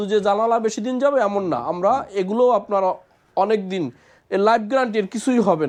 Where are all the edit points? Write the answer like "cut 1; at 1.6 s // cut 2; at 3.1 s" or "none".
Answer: none